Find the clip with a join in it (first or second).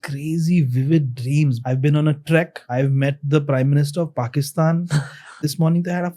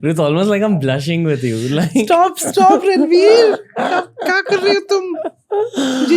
first